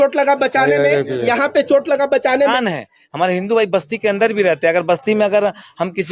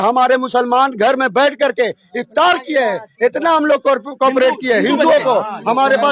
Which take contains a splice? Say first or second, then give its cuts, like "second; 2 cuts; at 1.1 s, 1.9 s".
first; 1 cut; at 2.5 s